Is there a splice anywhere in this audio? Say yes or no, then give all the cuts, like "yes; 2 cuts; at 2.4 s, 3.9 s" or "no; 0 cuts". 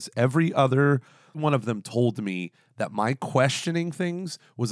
yes; 1 cut; at 1.4 s